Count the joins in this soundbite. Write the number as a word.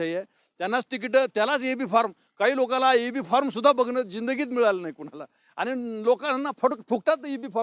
zero